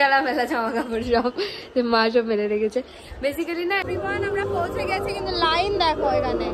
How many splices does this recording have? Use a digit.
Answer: 1